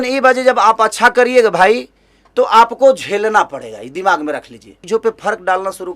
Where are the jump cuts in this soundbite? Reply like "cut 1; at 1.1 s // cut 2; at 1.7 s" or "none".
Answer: cut 1; at 4.7 s